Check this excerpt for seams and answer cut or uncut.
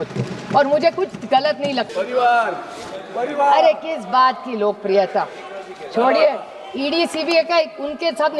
cut